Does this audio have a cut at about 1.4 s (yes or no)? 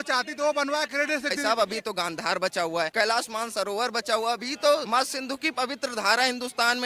yes